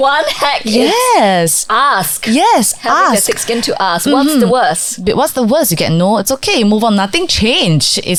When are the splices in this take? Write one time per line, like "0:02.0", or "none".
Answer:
none